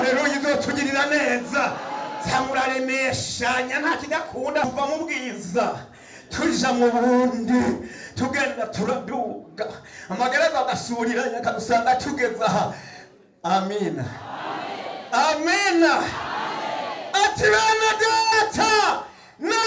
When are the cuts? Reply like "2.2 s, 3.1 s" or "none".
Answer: 4.6 s